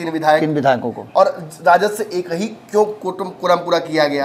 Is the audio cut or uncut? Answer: uncut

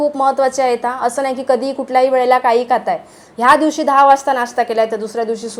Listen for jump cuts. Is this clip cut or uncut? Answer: uncut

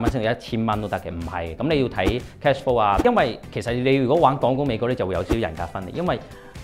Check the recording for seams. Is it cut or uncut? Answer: cut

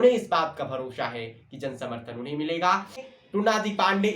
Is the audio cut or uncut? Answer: cut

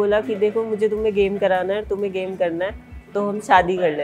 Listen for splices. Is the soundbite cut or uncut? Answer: uncut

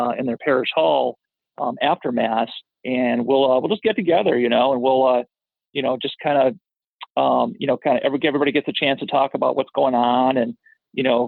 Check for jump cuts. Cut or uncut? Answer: uncut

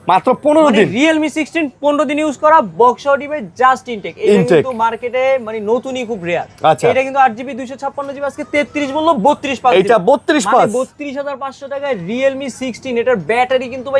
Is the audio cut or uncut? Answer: uncut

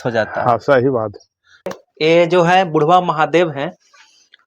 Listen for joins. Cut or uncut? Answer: cut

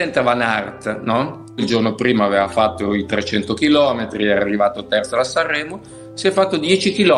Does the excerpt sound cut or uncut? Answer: cut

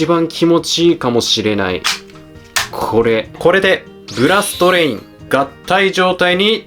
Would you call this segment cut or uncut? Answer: cut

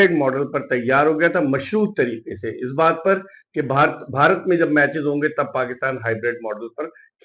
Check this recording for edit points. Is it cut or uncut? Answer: uncut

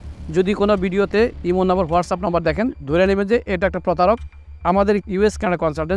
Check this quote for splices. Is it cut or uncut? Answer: cut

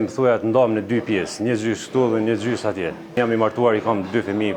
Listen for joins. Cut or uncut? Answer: cut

